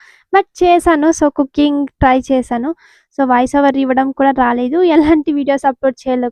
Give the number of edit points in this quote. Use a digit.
0